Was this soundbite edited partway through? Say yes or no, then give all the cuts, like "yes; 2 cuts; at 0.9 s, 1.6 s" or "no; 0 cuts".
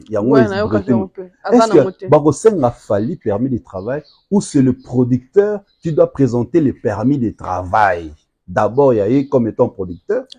no; 0 cuts